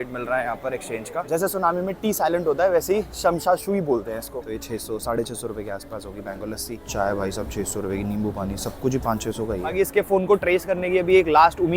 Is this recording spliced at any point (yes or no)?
yes